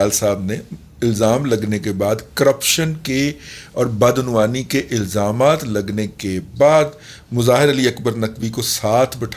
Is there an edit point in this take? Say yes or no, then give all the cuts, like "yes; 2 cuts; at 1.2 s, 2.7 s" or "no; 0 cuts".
no; 0 cuts